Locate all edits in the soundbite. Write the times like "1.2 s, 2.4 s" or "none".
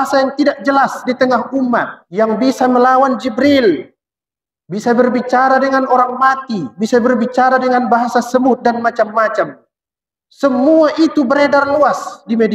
2.0 s